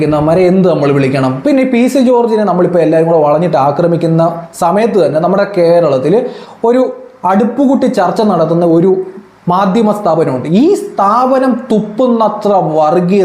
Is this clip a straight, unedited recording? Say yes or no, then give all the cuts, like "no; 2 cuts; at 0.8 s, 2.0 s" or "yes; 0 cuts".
no; 1 cut; at 1.4 s